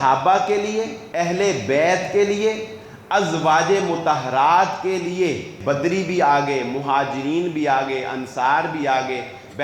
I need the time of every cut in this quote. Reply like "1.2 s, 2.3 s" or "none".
1.0 s, 5.5 s